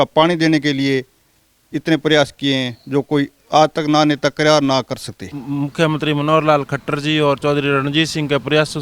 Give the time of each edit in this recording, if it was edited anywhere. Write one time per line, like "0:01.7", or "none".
0:05.4